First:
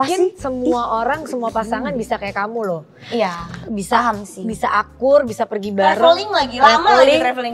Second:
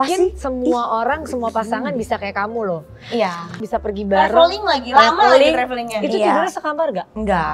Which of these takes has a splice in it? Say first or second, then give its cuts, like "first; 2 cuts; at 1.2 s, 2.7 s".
second; 1 cut; at 3.6 s